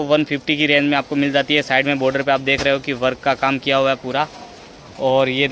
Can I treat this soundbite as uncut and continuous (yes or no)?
yes